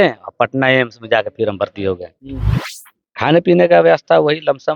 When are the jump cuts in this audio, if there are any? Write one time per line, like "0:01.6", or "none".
0:02.4